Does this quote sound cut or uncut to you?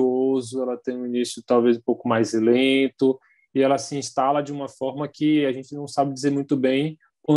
uncut